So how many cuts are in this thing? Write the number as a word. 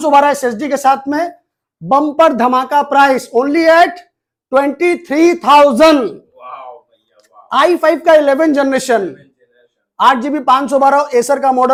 zero